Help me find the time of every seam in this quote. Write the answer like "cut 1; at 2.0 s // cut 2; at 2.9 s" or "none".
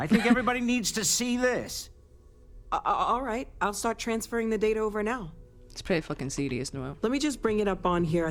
none

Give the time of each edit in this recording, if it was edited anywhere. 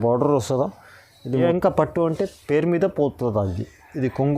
cut 1; at 1.4 s

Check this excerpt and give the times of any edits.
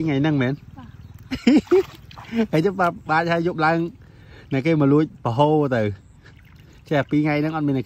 none

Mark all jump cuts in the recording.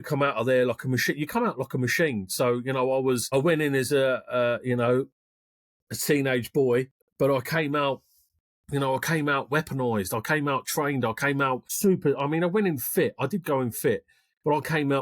cut 1; at 3.2 s // cut 2; at 7.0 s // cut 3; at 11.7 s

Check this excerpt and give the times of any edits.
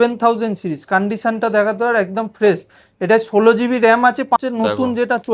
cut 1; at 4.4 s

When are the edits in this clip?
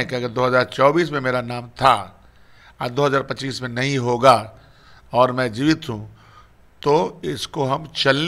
none

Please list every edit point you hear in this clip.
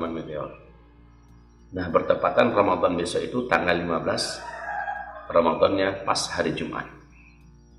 none

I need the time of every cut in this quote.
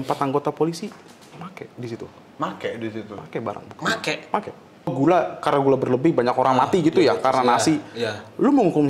cut 1; at 4.9 s

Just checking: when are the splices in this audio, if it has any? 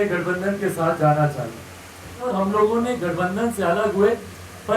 cut 1; at 2.2 s

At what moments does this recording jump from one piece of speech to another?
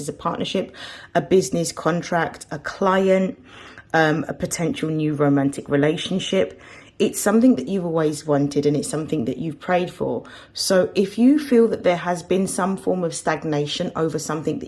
none

